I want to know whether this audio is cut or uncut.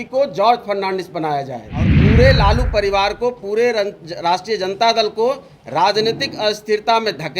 cut